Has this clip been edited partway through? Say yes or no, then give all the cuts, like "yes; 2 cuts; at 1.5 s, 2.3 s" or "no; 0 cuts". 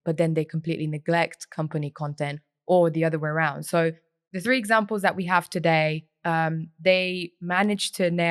no; 0 cuts